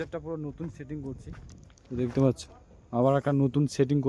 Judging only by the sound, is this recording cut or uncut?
uncut